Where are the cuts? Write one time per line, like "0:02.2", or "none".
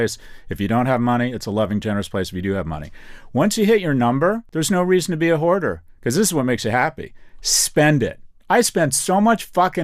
0:04.5